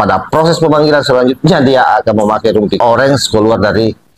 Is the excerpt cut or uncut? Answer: cut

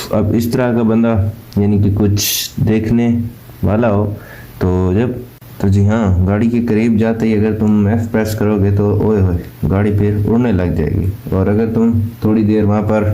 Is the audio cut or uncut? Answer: cut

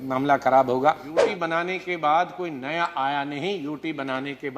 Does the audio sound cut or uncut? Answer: cut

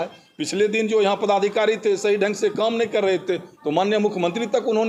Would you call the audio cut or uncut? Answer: uncut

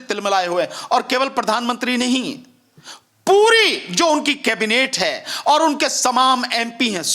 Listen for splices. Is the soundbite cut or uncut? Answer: uncut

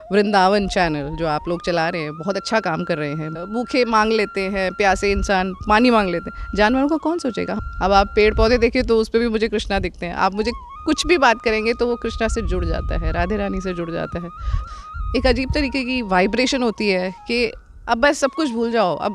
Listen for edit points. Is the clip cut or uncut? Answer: cut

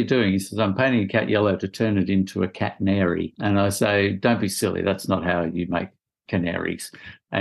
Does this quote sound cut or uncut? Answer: cut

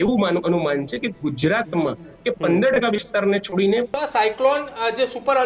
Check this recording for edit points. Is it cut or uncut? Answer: cut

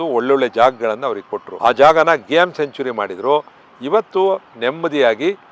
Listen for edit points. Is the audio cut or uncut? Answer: uncut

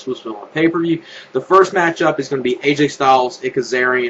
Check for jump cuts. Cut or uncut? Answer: uncut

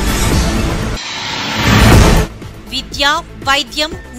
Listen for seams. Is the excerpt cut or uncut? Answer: uncut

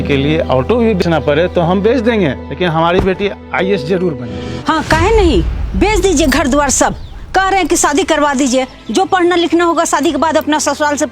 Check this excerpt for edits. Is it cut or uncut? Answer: cut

